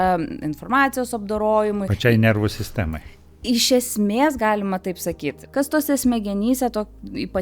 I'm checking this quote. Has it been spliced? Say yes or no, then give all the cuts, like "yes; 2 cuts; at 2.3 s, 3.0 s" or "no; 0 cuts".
yes; 1 cut; at 5.3 s